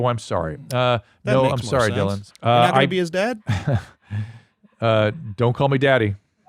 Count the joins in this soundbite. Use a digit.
2